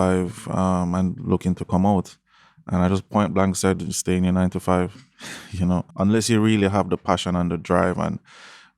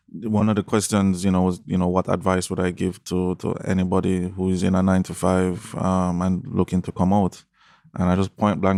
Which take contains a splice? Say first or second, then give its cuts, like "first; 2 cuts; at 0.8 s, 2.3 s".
first; 1 cut; at 5.9 s